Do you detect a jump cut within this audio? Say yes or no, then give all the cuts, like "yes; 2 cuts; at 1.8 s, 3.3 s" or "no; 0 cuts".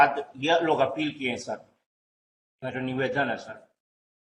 no; 0 cuts